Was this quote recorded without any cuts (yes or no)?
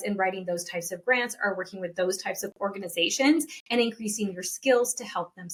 yes